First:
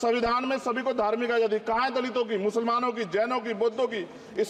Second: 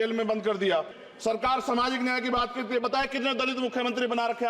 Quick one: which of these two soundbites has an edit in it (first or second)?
second